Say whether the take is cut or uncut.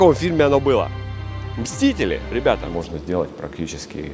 cut